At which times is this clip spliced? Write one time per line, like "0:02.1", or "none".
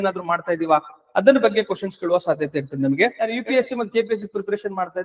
0:03.3